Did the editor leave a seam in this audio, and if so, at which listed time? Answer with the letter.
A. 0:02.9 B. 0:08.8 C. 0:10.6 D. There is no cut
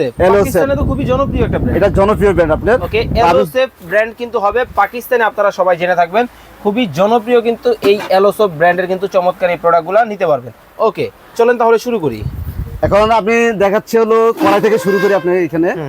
D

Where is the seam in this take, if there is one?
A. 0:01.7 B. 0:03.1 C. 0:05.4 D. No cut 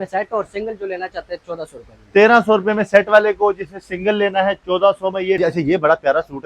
C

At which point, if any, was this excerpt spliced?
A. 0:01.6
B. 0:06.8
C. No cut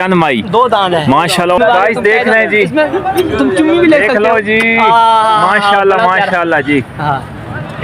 A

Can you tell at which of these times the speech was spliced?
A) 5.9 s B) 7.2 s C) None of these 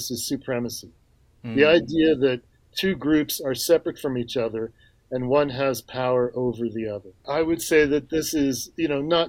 B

